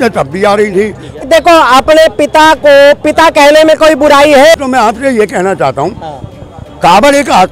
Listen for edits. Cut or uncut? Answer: cut